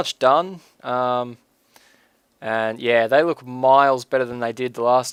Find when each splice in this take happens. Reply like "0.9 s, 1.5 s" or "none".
none